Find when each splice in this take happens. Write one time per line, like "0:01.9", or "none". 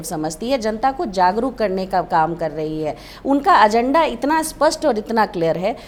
none